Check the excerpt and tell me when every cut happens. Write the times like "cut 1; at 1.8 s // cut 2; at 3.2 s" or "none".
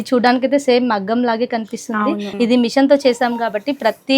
cut 1; at 2.3 s